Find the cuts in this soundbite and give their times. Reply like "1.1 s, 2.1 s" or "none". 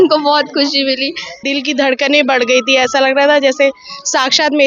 1.4 s